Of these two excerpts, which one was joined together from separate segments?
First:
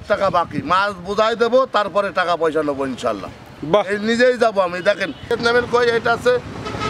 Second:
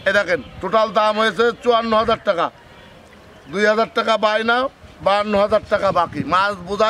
first; 1 cut; at 5.3 s

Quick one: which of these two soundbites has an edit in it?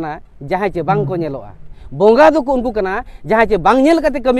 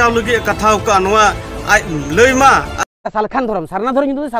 second; 1 cut; at 2.8 s

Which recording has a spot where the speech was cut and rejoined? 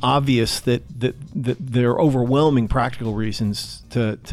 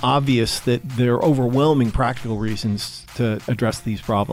second; 2 cuts; at 0.9 s, 3.4 s

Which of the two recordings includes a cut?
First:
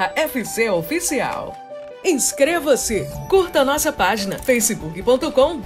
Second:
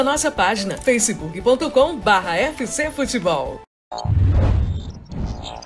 second; 1 cut; at 3.6 s

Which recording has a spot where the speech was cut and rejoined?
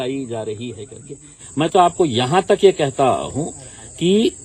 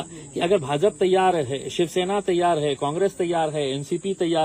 first; 1 cut; at 1.3 s

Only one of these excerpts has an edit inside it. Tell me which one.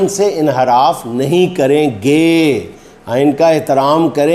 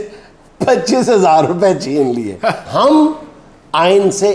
second; 1 cut; at 2.6 s

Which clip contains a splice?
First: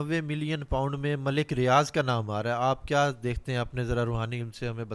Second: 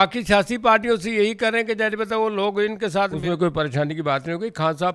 second; 1 cut; at 3.2 s

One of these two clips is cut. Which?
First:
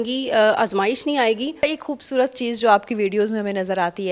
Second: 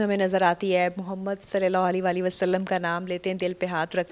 first; 1 cut; at 1.6 s

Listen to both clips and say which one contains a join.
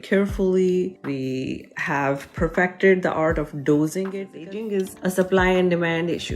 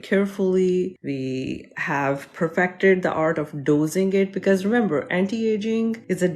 first; 1 cut; at 4.2 s

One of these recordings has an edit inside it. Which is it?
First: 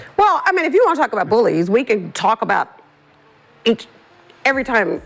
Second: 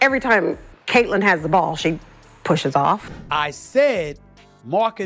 second; 1 cut; at 3.1 s

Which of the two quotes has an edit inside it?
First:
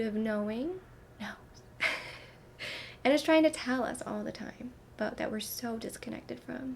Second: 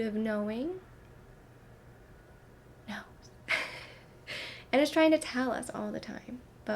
first; 1 cut; at 1.0 s

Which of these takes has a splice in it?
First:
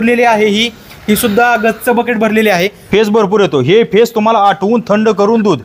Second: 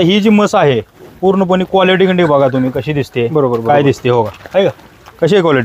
first; 1 cut; at 2.8 s

